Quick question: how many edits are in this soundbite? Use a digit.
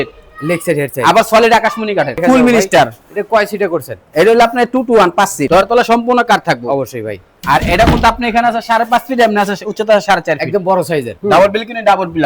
3